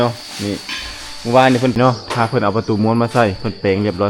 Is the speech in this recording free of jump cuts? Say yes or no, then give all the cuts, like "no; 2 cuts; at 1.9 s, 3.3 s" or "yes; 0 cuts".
no; 1 cut; at 1.8 s